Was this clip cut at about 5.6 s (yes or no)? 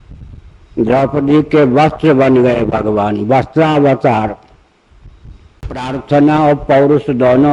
yes